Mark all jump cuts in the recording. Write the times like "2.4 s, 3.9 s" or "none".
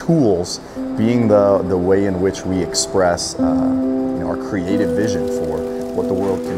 none